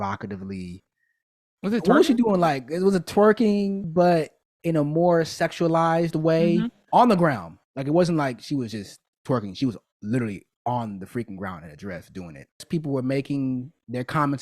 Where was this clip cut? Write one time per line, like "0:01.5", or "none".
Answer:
0:03.9
0:12.7